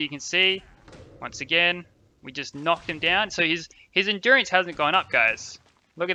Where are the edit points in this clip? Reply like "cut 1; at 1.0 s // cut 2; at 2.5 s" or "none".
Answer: none